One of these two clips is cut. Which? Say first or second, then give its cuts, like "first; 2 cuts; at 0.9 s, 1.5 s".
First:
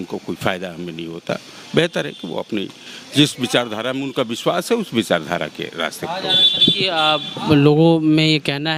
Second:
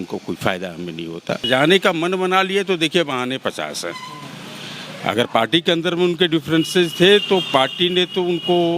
second; 1 cut; at 1.4 s